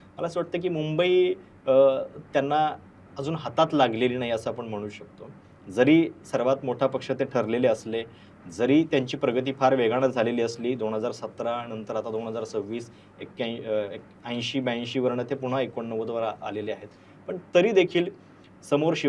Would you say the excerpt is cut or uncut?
uncut